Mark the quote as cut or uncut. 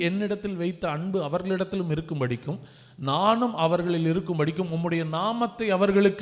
uncut